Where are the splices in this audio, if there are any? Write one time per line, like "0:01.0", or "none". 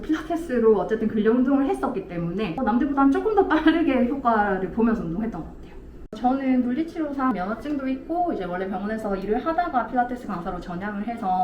0:02.6
0:06.1

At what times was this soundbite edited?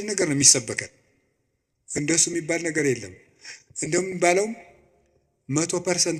none

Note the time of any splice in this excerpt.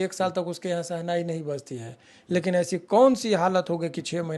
none

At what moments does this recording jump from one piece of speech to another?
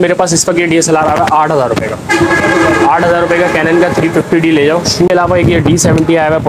0:05.1

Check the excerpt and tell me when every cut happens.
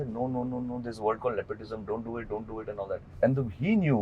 0:03.1

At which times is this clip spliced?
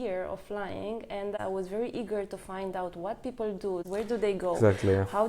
0:01.4
0:03.8

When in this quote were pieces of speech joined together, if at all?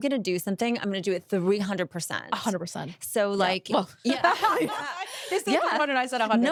none

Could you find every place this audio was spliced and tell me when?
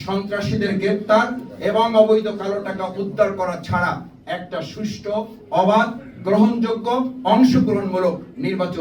none

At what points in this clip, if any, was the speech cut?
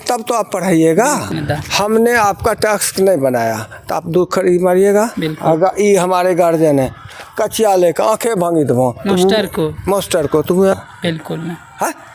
0:01.3
0:10.7

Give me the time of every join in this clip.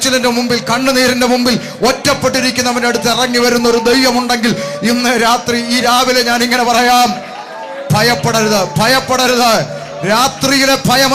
none

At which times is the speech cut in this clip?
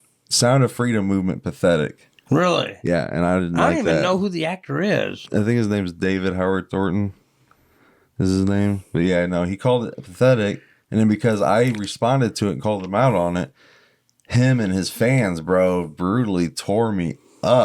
0:02.5
0:05.2

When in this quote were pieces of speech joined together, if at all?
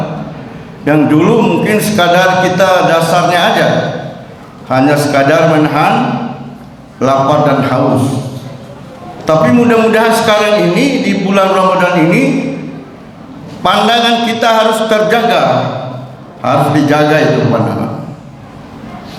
none

